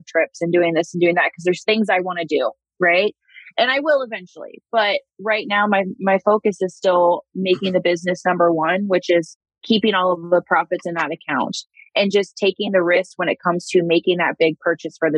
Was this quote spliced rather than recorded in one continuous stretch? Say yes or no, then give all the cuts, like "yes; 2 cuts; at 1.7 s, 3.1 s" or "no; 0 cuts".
yes; 1 cut; at 11.7 s